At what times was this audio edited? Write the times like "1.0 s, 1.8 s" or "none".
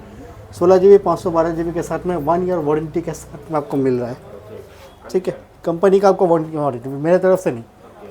none